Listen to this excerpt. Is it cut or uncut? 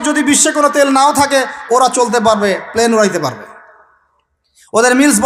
uncut